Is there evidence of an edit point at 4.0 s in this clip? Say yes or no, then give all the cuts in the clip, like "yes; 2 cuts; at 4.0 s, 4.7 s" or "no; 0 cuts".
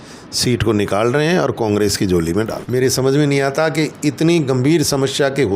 no; 1 cut; at 2.6 s